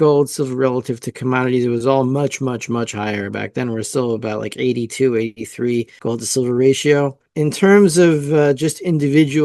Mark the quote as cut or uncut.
cut